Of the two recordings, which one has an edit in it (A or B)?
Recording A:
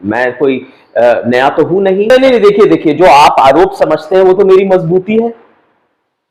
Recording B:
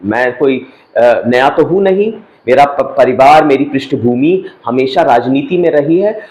A